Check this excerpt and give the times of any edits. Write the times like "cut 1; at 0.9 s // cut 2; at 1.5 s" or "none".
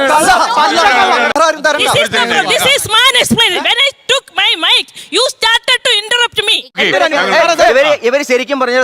cut 1; at 1.4 s // cut 2; at 6.7 s